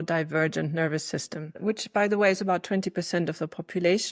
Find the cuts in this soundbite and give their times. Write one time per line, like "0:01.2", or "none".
0:01.6

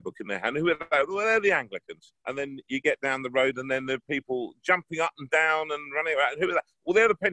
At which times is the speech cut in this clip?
0:02.1

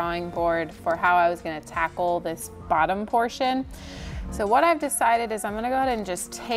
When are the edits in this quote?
none

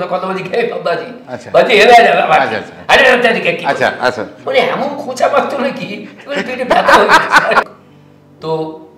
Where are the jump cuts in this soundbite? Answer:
0:07.7

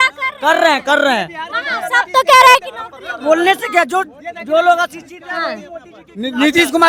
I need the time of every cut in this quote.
none

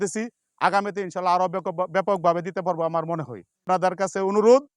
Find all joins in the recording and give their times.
0:03.6

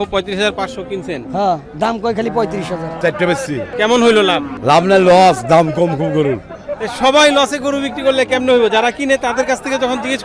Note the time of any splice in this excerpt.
0:03.0
0:03.7
0:04.5

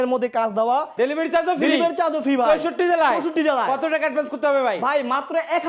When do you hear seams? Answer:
0:00.9

